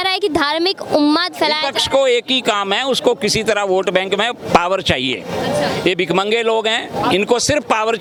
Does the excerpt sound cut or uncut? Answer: uncut